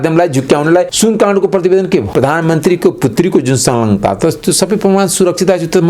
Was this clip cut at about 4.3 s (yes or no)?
no